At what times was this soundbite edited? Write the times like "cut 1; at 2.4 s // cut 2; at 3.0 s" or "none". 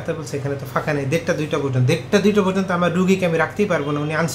none